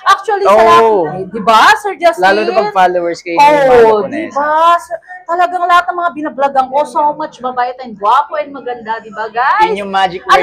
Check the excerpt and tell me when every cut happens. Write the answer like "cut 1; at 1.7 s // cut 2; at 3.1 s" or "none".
none